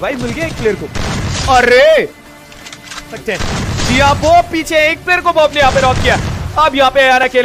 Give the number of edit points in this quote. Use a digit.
1